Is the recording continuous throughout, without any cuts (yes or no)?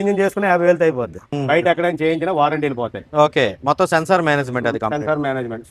no